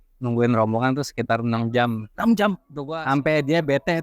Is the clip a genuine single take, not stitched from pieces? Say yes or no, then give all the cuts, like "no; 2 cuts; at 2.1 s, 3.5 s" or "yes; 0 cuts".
no; 1 cut; at 2.7 s